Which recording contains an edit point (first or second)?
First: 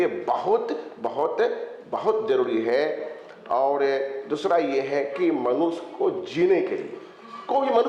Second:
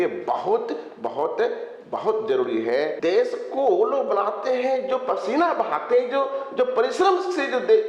second